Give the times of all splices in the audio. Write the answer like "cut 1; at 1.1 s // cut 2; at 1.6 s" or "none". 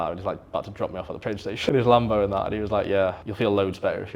cut 1; at 1.6 s // cut 2; at 3.2 s